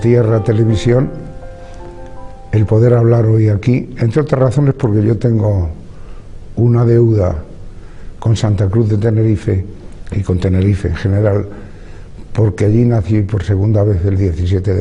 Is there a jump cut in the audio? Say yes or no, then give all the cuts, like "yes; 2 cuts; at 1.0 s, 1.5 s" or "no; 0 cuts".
yes; 1 cut; at 6.9 s